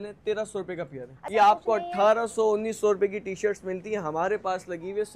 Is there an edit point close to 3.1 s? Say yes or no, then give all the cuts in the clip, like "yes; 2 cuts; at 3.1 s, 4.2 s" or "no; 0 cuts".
no; 1 cut; at 1.2 s